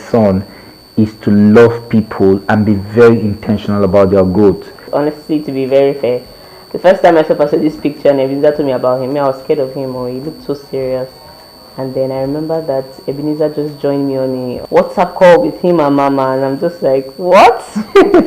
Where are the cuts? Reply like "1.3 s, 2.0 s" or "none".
4.9 s, 14.6 s